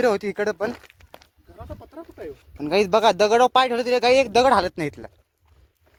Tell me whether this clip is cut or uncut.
uncut